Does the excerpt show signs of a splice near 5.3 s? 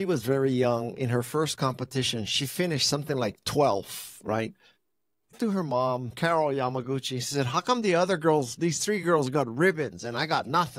yes; 1 cut; at 5.3 s

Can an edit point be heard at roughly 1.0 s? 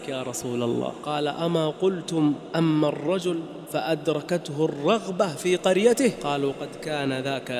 yes; 1 cut; at 1.0 s

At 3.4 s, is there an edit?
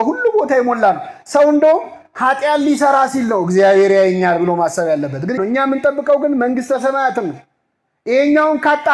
no; 1 cut; at 5.4 s

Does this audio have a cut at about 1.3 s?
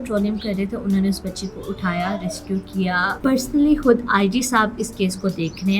no; 1 cut; at 3.1 s

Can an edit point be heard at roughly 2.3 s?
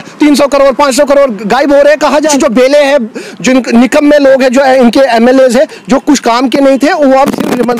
yes; 1 cut; at 2.3 s

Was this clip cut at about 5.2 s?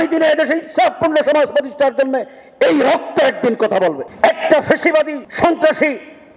yes; 2 cuts; at 4.1 s, 5.2 s

